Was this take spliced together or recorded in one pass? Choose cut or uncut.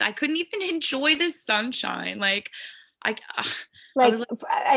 uncut